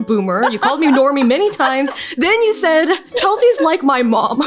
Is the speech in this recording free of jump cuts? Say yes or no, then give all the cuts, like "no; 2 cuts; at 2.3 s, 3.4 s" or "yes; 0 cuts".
no; 1 cut; at 3.1 s